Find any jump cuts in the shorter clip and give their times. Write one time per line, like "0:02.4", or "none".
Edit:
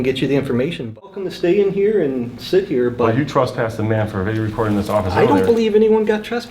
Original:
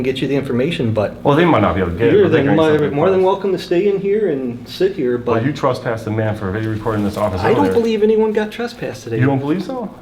0:01.1